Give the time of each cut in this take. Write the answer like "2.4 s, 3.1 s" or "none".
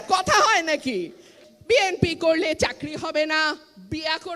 1.3 s